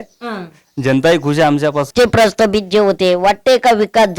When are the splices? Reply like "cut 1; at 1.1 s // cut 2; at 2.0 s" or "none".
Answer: cut 1; at 1.9 s